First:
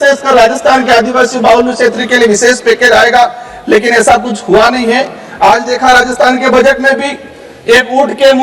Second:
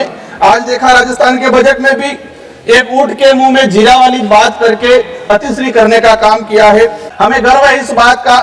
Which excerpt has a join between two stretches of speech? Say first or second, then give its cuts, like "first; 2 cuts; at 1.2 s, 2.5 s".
second; 1 cut; at 7.0 s